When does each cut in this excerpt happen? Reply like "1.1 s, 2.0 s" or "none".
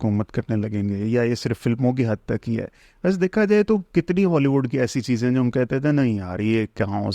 none